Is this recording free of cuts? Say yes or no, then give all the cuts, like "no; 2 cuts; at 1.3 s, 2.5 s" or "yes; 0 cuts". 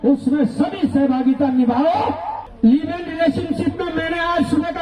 yes; 0 cuts